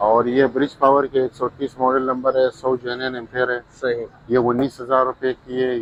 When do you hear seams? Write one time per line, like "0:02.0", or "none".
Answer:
none